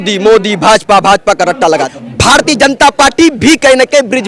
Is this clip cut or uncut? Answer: cut